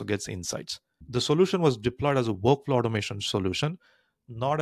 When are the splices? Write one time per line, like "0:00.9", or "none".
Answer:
0:01.0